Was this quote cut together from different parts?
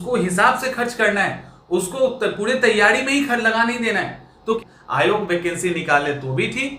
yes; 1 cut; at 4.6 s

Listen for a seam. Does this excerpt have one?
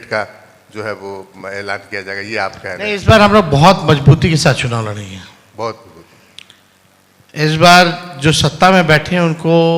no; 0 cuts

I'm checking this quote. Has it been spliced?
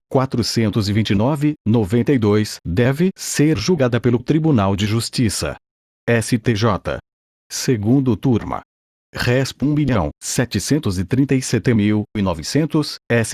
no; 0 cuts

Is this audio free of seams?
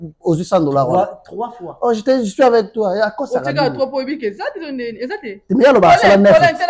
yes; 0 cuts

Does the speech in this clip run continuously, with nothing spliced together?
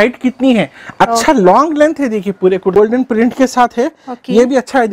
no; 1 cut; at 2.7 s

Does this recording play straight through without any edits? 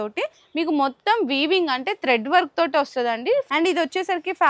no; 1 cut; at 3.5 s

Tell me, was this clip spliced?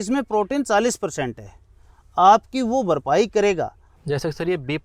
no; 0 cuts

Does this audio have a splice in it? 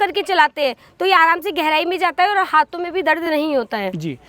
no; 0 cuts

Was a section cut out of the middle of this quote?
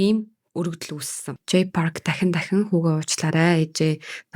yes; 1 cut; at 1.3 s

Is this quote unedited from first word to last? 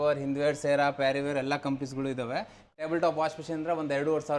no; 1 cut; at 2.7 s

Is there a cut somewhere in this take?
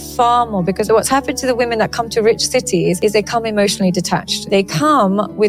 yes; 3 cuts; at 0.9 s, 3.0 s, 4.3 s

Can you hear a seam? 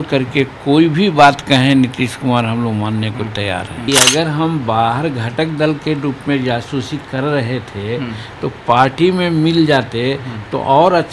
yes; 1 cut; at 3.9 s

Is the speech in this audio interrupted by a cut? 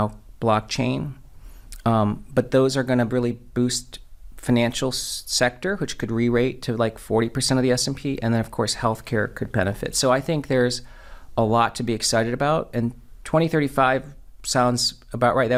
no; 0 cuts

